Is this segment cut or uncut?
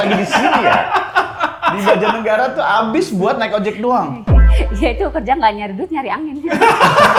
uncut